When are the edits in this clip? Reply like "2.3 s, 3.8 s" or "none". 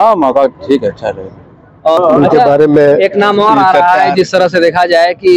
2.0 s